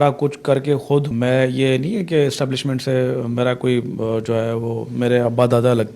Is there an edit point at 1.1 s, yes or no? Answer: yes